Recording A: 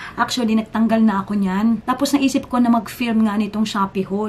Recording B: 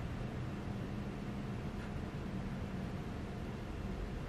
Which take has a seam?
A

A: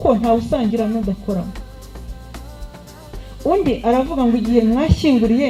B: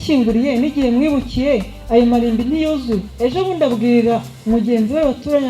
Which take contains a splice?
B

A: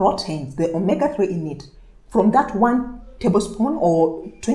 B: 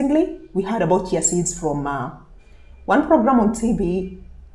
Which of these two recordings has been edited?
A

